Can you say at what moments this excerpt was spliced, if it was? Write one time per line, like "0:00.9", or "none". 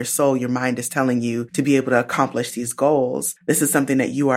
0:01.5
0:03.3